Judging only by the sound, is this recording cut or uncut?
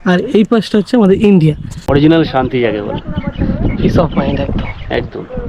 cut